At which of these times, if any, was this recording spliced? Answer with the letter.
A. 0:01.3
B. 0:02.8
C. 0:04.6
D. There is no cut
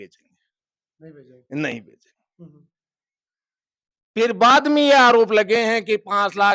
D